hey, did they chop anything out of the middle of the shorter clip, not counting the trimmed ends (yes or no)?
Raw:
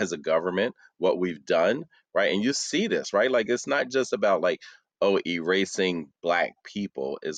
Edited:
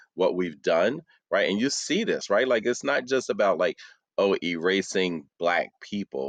no